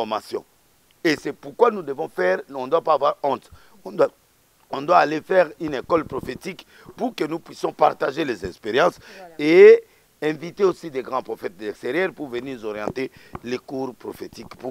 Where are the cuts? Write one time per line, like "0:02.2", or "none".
none

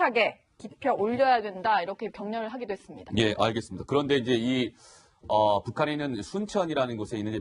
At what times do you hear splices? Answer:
0:04.2

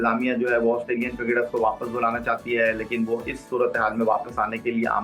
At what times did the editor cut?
none

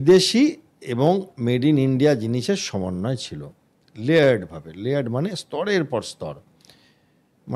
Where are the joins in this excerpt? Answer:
none

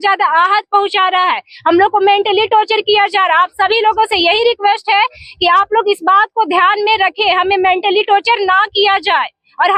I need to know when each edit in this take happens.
none

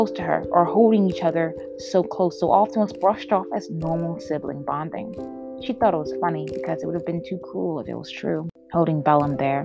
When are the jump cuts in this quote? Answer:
0:08.6

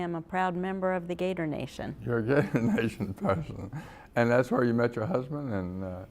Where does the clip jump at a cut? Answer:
0:01.6

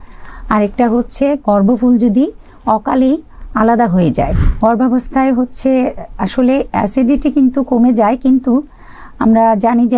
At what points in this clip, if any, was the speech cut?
0:04.4

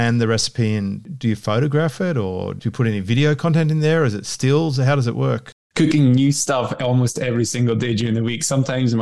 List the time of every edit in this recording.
0:01.1
0:05.6

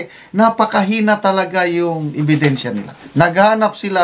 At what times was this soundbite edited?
0:03.0

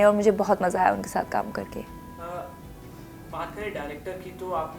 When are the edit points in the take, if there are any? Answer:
none

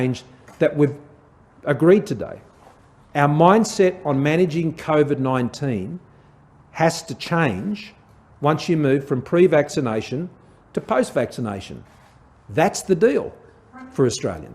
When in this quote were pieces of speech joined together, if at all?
none

